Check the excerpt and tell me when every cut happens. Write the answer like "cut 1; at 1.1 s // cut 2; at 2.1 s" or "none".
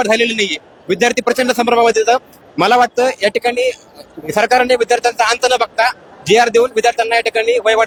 none